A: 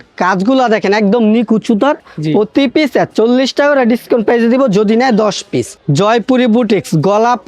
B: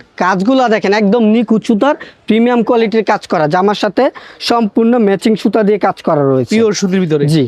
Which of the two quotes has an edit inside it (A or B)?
A